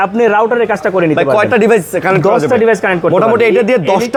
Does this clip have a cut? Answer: no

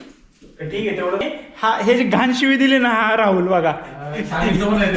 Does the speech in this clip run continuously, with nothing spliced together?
no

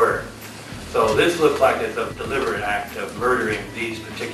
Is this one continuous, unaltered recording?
no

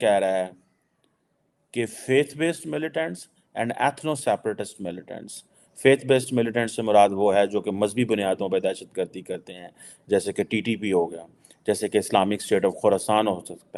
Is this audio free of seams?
yes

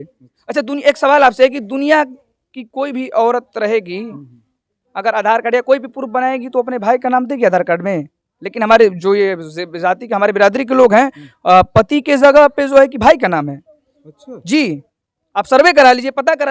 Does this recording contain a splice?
no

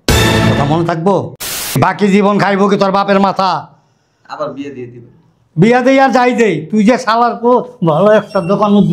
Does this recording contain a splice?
yes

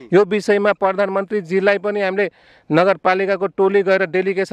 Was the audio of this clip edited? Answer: no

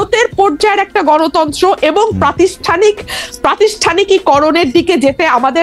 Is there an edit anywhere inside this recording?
no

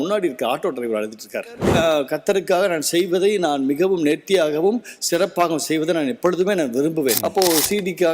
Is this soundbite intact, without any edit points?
no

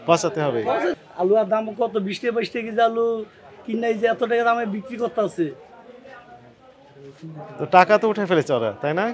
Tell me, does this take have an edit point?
yes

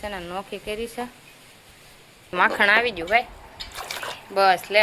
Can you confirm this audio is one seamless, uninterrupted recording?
no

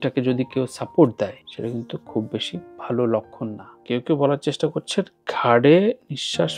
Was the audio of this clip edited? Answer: yes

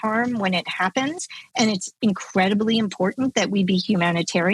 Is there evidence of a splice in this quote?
no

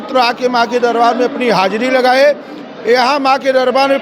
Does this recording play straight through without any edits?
yes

